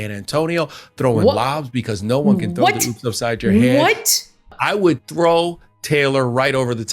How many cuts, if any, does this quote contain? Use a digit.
1